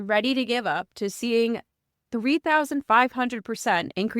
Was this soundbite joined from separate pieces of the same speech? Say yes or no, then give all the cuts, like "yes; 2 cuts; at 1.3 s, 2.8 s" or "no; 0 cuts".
yes; 1 cut; at 1.0 s